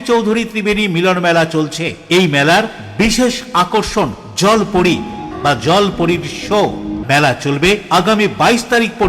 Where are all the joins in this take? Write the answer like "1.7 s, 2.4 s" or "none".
5.3 s, 7.0 s